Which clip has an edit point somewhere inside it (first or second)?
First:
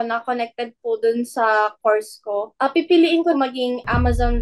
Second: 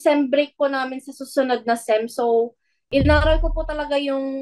first